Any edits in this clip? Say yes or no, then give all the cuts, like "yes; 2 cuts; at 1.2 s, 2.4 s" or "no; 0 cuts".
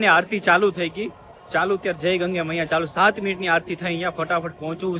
no; 0 cuts